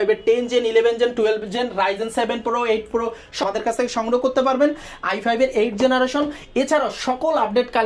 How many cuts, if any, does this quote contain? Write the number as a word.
one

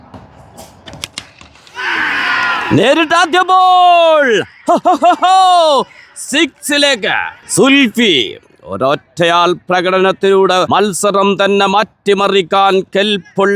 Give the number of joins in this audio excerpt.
two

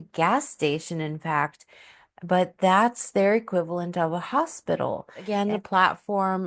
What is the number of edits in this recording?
one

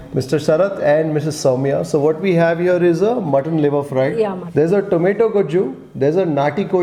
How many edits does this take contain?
zero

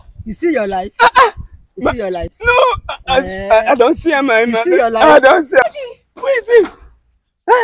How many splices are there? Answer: one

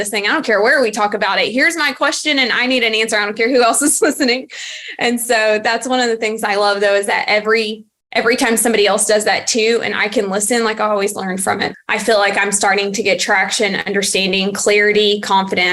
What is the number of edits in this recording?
one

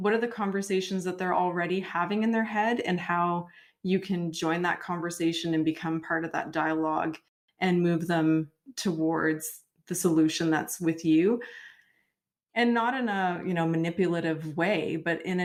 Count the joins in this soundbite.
zero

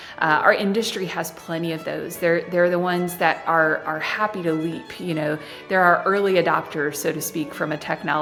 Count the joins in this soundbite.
zero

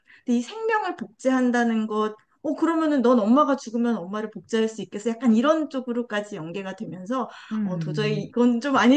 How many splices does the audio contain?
zero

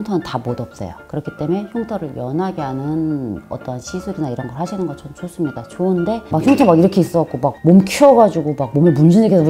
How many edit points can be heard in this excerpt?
one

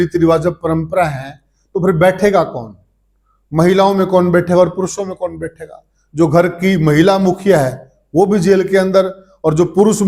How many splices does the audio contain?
zero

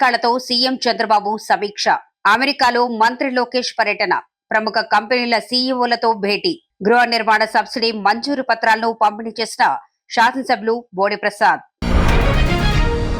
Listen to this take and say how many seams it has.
one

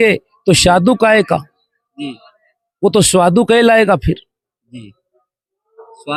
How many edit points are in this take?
zero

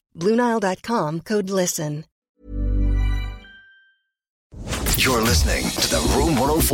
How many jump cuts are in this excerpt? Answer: two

